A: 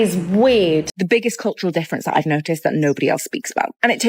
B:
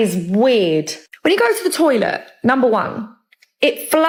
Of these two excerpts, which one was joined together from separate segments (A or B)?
A